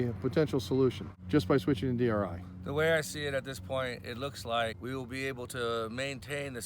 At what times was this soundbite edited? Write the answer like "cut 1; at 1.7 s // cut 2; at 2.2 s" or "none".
cut 1; at 1.3 s // cut 2; at 4.8 s